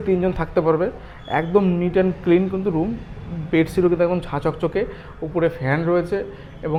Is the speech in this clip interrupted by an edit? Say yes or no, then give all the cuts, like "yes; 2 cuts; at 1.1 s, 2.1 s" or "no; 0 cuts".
no; 0 cuts